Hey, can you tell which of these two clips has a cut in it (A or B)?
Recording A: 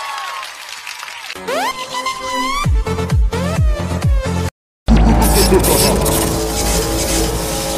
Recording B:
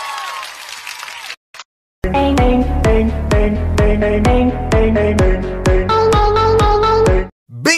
A